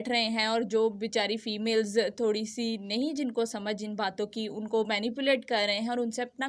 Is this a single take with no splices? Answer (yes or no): yes